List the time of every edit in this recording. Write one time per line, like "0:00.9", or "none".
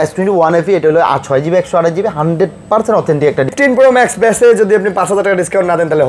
0:03.5